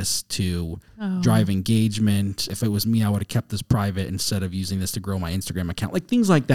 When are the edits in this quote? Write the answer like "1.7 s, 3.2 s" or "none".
2.5 s